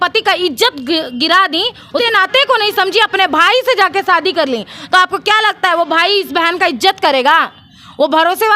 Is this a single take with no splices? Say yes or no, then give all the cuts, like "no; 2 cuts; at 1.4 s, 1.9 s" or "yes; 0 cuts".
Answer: no; 1 cut; at 2.0 s